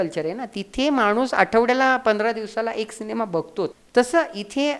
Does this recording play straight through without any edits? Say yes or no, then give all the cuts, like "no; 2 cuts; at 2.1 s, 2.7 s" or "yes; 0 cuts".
no; 1 cut; at 3.8 s